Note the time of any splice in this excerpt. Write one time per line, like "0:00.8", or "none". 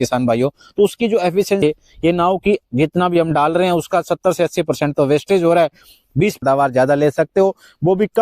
0:01.6
0:06.4